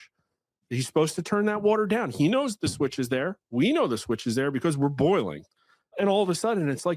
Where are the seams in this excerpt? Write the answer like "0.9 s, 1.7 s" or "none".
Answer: none